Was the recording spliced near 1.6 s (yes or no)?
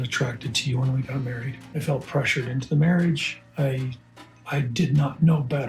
yes